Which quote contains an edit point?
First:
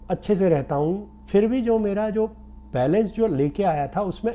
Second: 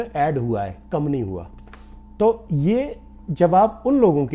first; 1 cut; at 1.1 s

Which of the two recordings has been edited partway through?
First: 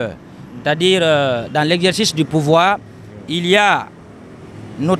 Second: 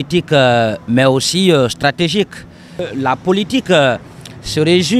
second; 1 cut; at 2.9 s

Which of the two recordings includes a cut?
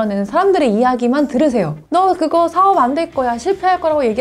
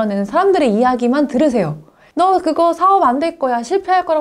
first; 1 cut; at 1.8 s

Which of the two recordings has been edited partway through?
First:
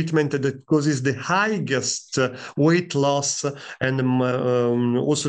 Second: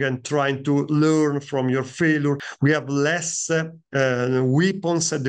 second; 1 cut; at 2.5 s

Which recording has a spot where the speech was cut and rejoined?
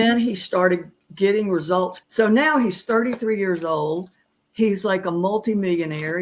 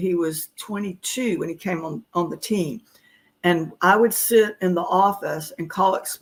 first; 1 cut; at 2.0 s

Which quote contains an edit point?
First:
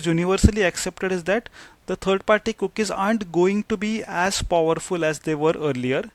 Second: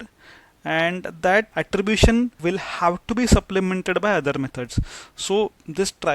second; 2 cuts; at 1.5 s, 2.4 s

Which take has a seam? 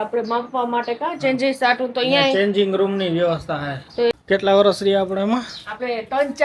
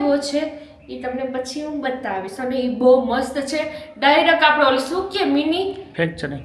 first; 1 cut; at 4.1 s

